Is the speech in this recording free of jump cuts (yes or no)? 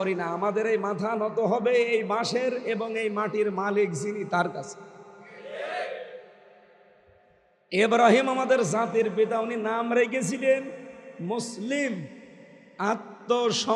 yes